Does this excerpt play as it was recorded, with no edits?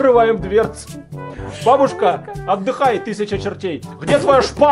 yes; 0 cuts

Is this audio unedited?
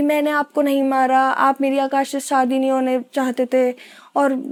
yes; 0 cuts

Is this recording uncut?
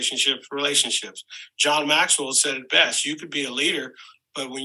yes; 0 cuts

